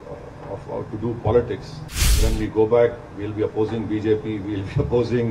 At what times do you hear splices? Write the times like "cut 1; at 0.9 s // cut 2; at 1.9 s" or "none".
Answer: cut 1; at 2.2 s